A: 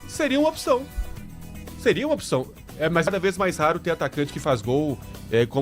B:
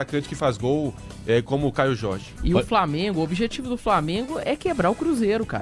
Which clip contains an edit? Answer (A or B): A